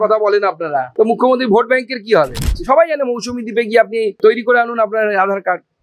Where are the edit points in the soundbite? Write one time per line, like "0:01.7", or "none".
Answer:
0:00.9
0:02.5
0:04.2